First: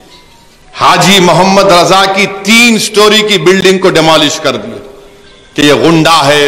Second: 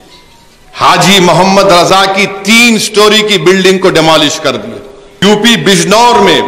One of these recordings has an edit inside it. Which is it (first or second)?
second